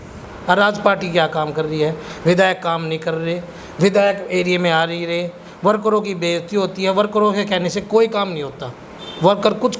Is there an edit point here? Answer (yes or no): no